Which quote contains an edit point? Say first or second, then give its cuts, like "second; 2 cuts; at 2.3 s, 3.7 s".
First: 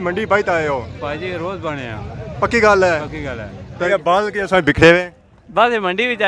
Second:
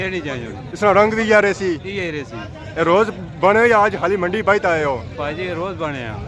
first; 1 cut; at 3.9 s